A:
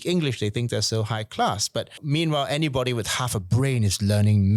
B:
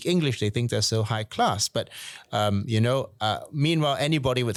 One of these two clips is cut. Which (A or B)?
A